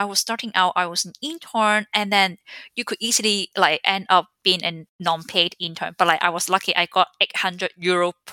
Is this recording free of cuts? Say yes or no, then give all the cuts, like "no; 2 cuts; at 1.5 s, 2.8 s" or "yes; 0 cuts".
no; 1 cut; at 4.9 s